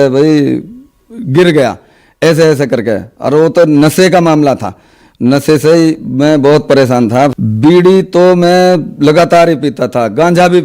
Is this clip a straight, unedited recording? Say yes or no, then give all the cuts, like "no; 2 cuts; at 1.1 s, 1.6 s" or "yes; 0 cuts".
no; 1 cut; at 7.3 s